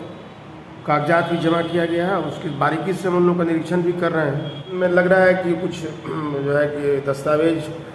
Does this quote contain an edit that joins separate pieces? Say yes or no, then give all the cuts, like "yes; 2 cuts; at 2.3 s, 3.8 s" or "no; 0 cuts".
yes; 1 cut; at 4.7 s